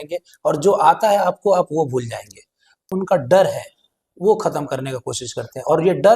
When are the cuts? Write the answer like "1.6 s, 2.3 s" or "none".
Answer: 2.9 s

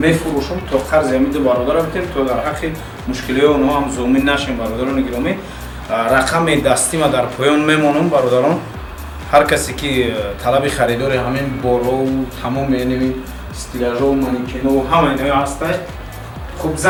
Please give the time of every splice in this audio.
none

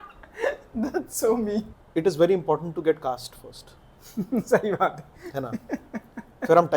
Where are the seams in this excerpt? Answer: 1.8 s

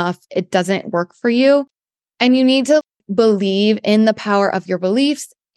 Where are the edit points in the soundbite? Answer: none

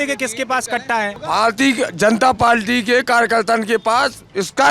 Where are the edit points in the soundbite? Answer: 1.2 s

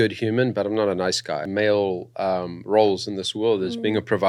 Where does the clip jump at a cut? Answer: 1.5 s

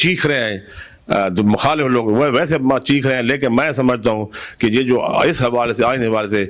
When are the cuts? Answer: none

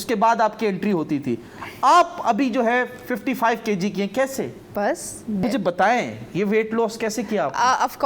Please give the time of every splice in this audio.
5.4 s

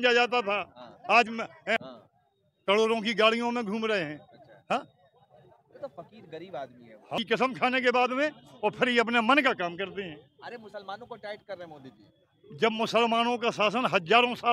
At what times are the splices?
1.8 s, 7.2 s

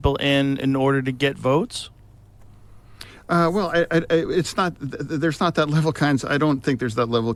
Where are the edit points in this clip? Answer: none

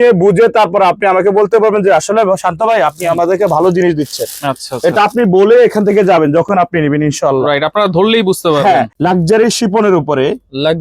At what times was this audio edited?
8.9 s

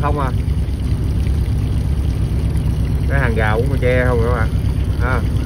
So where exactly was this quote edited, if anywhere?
none

